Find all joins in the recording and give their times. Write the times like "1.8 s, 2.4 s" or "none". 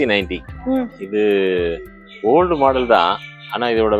none